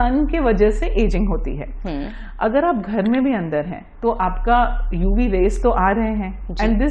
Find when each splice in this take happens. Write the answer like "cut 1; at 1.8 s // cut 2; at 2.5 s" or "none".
none